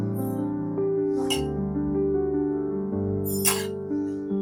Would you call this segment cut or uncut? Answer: uncut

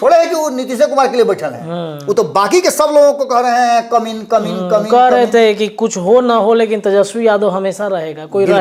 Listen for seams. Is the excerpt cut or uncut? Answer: uncut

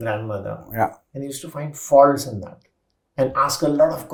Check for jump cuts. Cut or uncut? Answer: uncut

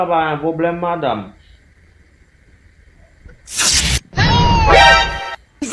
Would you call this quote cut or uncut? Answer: uncut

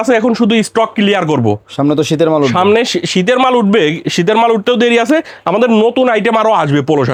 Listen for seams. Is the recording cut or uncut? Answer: uncut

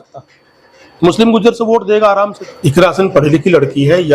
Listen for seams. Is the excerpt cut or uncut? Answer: cut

